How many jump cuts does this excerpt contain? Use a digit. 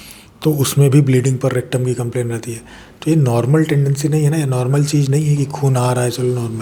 0